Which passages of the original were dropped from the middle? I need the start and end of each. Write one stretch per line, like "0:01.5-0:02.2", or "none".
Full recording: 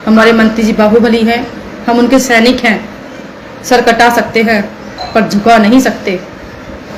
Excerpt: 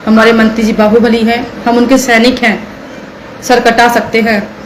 0:01.5-0:01.7